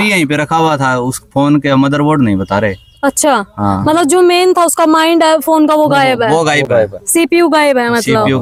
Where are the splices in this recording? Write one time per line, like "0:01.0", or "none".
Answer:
none